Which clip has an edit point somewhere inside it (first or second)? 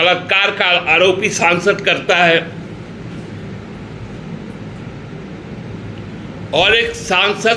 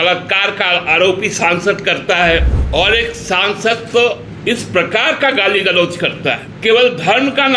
second